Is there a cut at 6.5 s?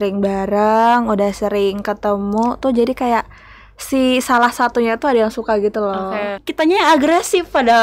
yes; 1 cut; at 6.5 s

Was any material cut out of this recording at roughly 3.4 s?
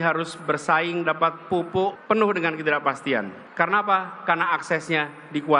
no; 1 cut; at 2.1 s

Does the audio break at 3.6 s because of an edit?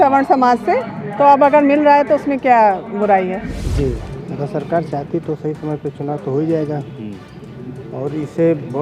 yes; 1 cut; at 3.6 s

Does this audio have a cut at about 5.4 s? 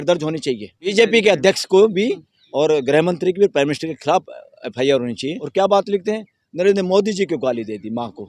yes; 2 cuts; at 0.9 s, 5.4 s

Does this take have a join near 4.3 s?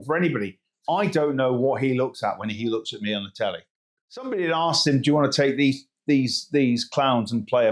yes; 1 cut; at 4.3 s

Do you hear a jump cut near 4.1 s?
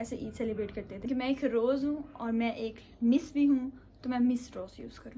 no; 1 cut; at 1.1 s

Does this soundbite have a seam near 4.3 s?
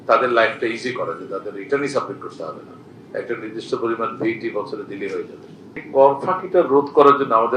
no; 1 cut; at 5.8 s

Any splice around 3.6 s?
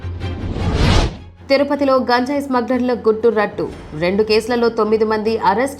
no; 1 cut; at 1.3 s

